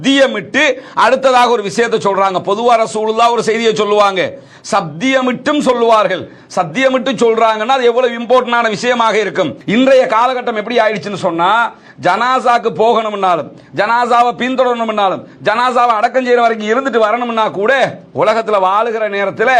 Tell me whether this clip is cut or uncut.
cut